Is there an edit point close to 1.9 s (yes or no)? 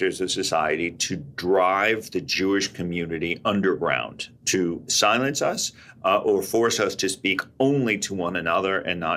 no